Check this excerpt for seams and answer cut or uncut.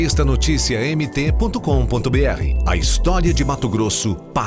uncut